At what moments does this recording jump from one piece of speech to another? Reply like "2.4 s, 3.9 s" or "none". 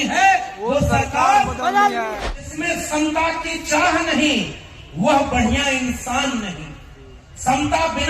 2.1 s